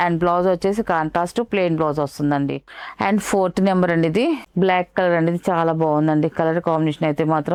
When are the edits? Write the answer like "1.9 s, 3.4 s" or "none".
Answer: none